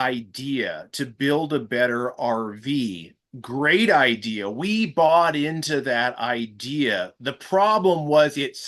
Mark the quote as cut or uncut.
uncut